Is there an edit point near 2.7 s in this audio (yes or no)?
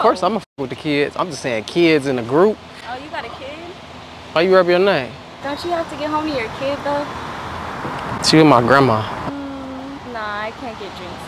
no